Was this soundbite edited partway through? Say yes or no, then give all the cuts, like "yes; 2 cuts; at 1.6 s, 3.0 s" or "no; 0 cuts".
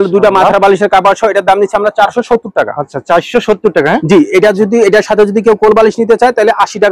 no; 0 cuts